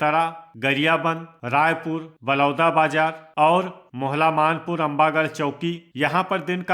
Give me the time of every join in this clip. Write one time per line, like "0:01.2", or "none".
0:03.8
0:05.9